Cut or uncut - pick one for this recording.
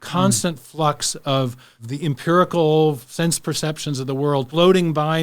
cut